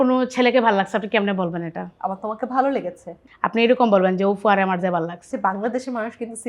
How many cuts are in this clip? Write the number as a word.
two